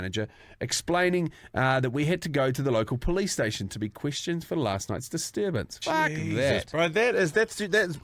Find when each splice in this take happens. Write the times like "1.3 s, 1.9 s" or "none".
5.7 s